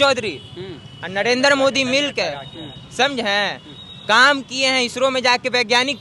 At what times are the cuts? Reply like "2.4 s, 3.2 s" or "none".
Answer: none